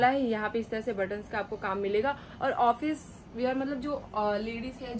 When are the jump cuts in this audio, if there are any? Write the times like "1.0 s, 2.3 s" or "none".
none